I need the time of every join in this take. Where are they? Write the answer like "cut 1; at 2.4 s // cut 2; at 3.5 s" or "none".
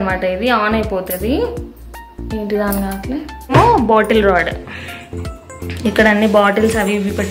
cut 1; at 3.5 s